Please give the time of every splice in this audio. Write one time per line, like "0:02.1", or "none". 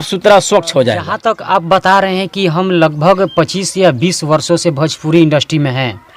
0:01.1